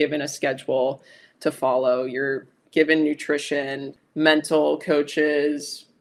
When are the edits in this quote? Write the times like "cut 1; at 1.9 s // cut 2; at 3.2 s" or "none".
none